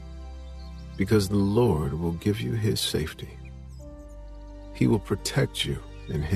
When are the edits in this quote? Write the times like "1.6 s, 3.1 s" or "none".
none